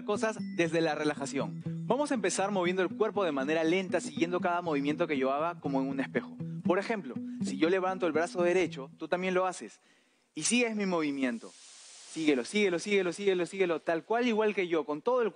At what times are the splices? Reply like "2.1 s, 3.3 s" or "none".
none